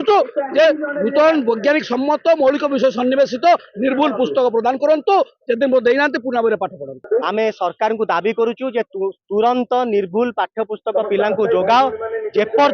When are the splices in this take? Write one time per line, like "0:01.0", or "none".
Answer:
0:07.0